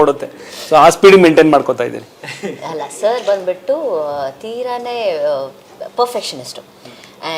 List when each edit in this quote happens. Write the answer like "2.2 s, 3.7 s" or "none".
none